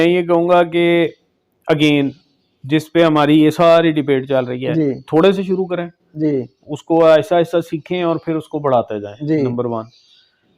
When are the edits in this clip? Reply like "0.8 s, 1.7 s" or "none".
none